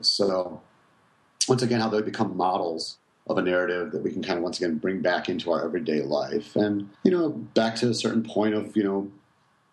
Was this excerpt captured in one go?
no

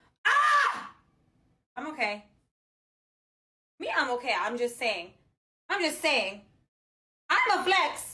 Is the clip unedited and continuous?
yes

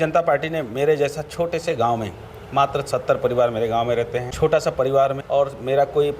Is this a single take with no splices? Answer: no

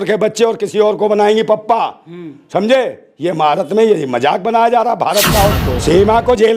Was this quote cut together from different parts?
yes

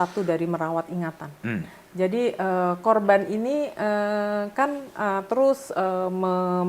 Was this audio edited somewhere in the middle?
no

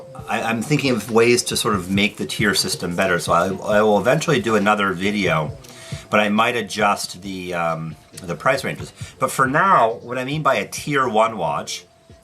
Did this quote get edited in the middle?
yes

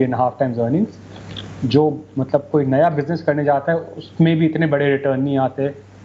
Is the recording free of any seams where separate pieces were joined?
yes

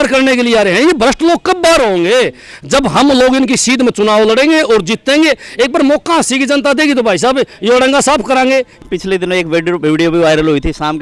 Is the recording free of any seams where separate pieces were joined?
no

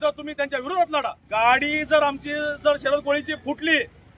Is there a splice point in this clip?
yes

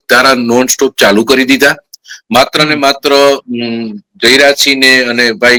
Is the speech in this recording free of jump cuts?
yes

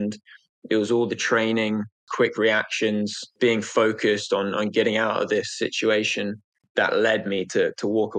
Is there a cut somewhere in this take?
yes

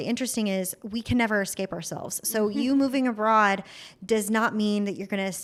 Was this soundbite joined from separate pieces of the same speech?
no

